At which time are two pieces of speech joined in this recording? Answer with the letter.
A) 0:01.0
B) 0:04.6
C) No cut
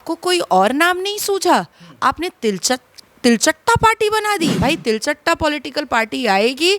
B